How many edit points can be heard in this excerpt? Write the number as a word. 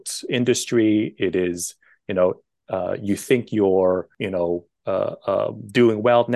one